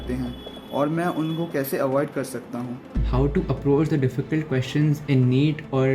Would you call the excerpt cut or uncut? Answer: cut